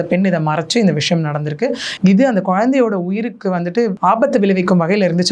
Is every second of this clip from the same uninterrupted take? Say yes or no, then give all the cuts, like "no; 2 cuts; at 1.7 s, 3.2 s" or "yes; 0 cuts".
no; 2 cuts; at 1.9 s, 4.0 s